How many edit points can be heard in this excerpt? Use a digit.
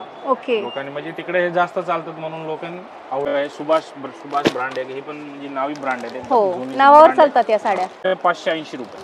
2